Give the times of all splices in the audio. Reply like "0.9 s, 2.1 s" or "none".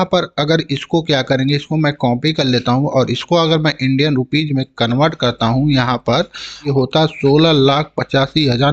6.7 s